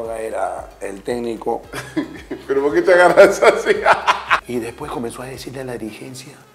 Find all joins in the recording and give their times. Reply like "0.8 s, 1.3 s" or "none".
4.4 s